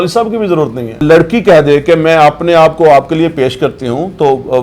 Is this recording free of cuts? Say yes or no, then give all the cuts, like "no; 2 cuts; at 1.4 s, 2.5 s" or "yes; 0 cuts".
no; 1 cut; at 1.0 s